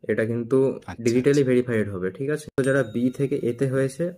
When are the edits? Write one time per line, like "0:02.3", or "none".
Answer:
0:02.6